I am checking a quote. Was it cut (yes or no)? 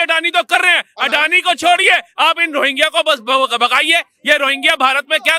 no